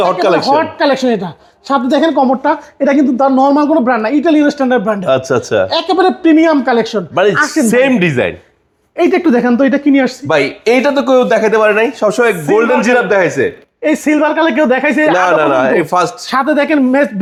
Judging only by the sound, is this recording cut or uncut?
uncut